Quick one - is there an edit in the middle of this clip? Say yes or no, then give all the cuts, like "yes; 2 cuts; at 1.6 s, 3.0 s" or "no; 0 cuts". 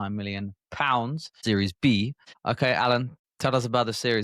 yes; 3 cuts; at 1.3 s, 2.3 s, 3.2 s